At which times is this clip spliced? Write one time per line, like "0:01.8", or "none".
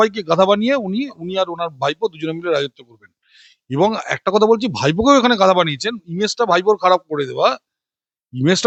none